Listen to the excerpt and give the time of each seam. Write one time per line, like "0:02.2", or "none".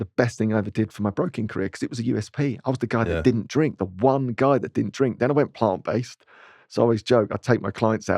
none